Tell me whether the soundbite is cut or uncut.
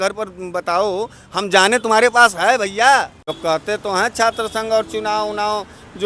cut